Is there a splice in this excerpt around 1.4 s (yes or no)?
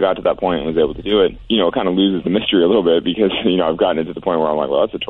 yes